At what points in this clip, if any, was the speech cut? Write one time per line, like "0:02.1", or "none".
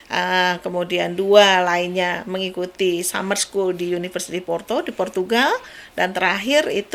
none